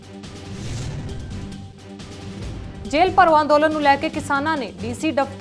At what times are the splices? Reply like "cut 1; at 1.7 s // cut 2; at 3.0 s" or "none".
cut 1; at 1.3 s